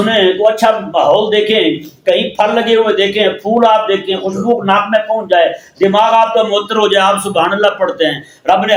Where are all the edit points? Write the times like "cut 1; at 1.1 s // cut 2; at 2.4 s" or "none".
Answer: none